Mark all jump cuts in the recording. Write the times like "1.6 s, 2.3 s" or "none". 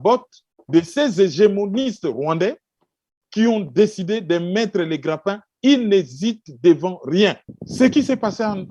7.4 s